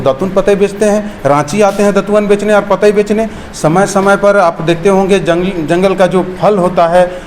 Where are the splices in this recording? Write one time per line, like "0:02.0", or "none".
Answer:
none

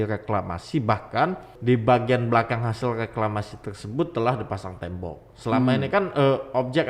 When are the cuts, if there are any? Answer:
0:01.5

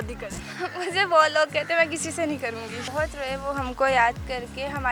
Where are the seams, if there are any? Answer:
0:02.7

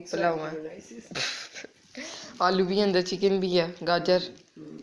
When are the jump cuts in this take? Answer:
none

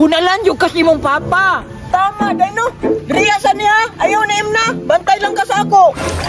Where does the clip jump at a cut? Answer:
none

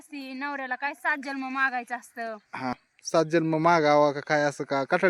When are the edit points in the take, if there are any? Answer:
0:02.9

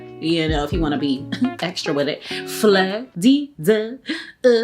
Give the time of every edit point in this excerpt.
0:03.0

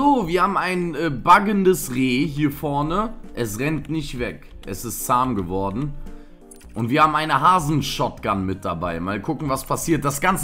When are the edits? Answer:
none

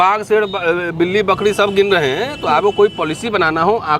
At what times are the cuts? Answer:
none

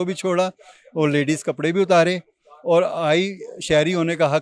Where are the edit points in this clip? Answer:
none

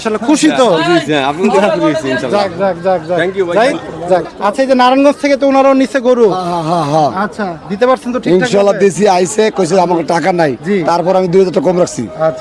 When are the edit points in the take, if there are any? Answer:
0:04.3

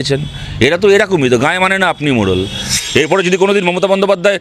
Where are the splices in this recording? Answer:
0:02.8

